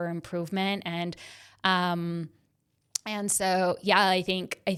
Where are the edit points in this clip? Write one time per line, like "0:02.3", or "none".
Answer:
none